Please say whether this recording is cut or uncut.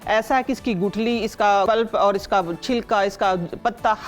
cut